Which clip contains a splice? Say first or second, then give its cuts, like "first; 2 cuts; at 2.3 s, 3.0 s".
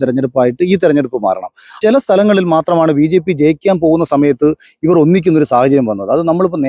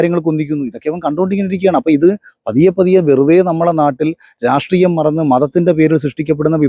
first; 1 cut; at 1.8 s